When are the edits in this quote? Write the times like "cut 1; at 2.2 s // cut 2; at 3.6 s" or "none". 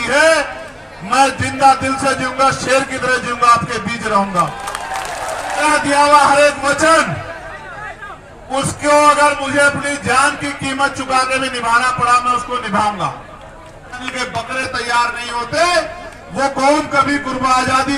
cut 1; at 5.6 s // cut 2; at 14.1 s